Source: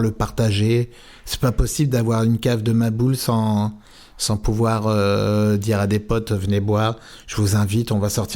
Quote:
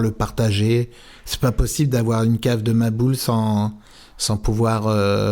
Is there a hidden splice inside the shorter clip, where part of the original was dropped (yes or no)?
no